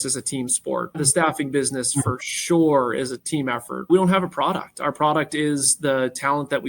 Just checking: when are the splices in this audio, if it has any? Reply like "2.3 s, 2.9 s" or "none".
0.9 s, 3.3 s